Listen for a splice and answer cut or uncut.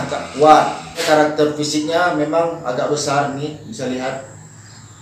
cut